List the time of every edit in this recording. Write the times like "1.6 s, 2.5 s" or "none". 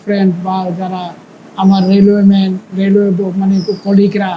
none